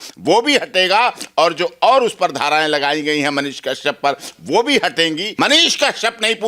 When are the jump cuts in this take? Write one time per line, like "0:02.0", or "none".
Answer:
0:05.3